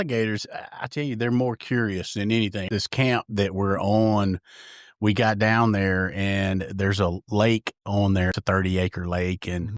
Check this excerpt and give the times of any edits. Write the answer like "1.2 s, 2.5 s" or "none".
2.6 s, 8.4 s

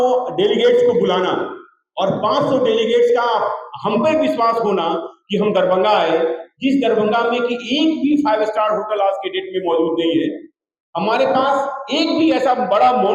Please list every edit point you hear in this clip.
none

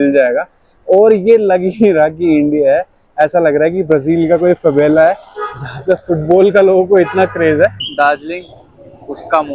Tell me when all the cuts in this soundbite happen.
7.8 s

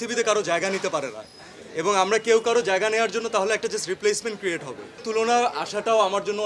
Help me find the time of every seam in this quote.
5.0 s

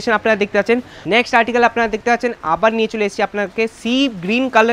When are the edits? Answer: 0.9 s

